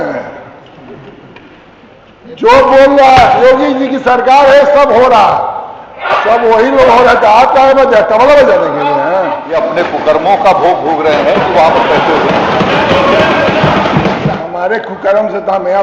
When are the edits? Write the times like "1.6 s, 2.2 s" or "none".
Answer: 9.4 s, 14.4 s